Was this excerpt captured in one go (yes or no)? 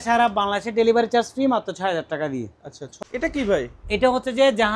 no